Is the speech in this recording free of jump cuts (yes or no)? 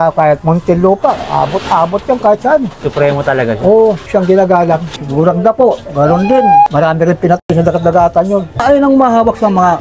no